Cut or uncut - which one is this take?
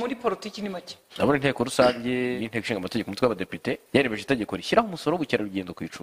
cut